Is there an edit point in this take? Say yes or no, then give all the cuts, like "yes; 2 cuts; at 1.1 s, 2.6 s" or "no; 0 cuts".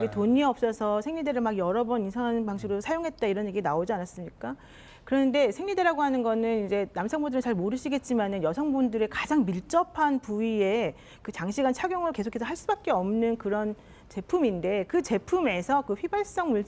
no; 0 cuts